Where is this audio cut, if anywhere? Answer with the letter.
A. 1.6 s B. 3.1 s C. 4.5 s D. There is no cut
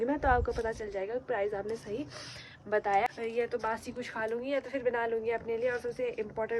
B